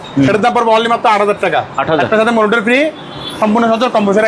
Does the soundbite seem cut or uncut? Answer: uncut